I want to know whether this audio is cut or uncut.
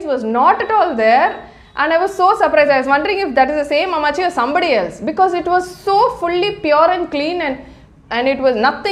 uncut